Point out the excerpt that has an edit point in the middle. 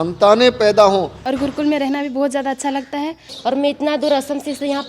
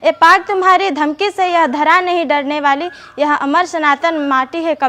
first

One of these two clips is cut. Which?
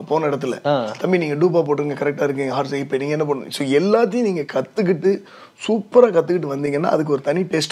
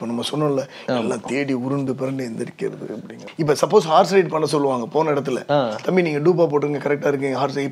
second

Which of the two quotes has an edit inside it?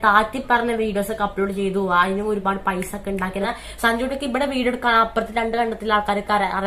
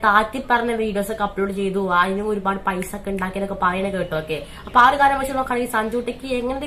first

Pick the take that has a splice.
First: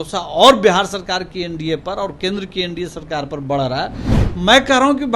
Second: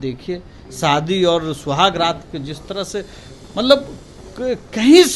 first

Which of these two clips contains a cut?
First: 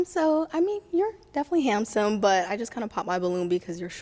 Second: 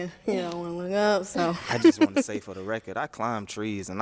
second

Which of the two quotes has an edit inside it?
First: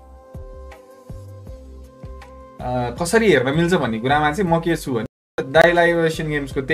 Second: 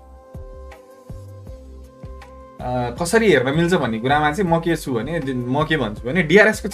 first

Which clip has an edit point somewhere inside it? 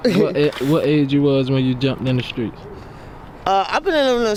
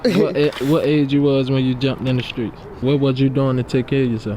second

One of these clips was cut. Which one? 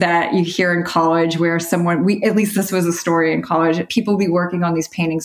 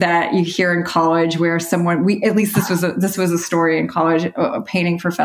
first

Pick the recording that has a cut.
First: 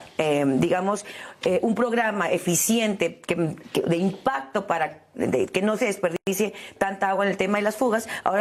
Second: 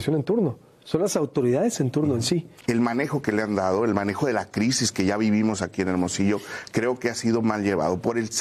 second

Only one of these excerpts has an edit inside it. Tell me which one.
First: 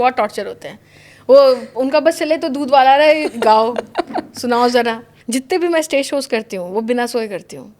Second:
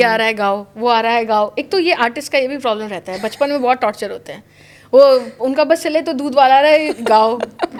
first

